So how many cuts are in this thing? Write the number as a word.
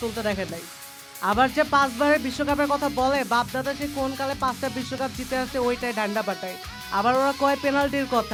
zero